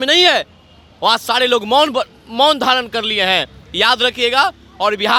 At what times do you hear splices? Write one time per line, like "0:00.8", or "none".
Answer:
none